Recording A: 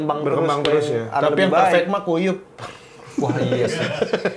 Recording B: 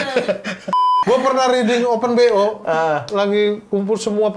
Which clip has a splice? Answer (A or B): B